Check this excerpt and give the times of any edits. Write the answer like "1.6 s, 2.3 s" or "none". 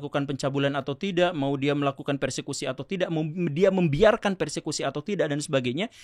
none

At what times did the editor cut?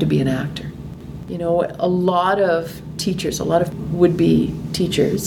1.0 s, 3.7 s

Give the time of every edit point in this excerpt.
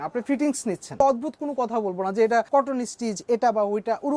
1.0 s, 2.5 s

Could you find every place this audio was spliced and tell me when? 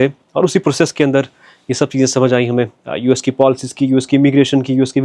none

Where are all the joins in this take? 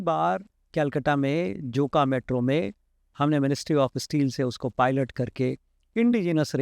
none

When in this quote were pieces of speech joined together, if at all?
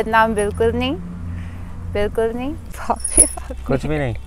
2.7 s

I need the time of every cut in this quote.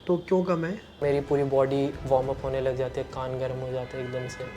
1.0 s

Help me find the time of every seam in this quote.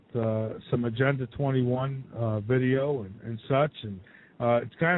3.6 s

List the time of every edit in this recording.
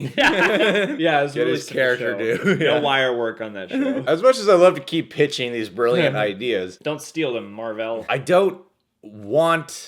none

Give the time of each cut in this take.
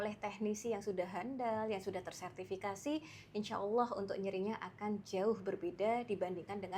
none

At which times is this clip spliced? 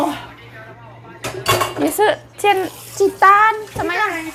none

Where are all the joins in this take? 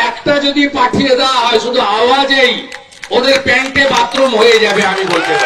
none

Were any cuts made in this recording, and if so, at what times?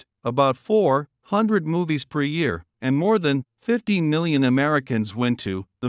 2.7 s

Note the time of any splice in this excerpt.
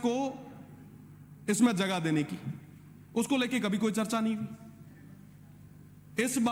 none

